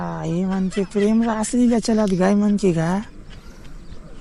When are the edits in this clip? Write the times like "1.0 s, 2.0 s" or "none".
none